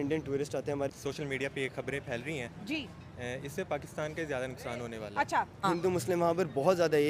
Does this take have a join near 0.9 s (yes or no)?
yes